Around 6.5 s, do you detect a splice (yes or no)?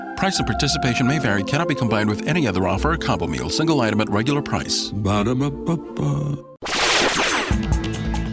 yes